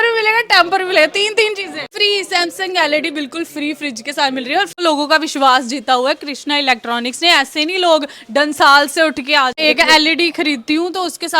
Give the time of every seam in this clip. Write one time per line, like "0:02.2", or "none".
0:01.9
0:04.7
0:09.6